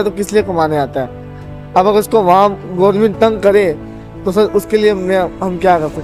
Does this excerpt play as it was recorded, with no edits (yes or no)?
yes